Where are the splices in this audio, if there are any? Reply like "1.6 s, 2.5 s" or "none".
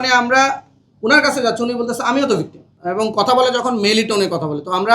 2.7 s